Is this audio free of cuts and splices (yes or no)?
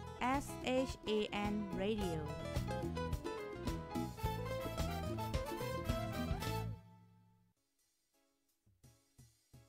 yes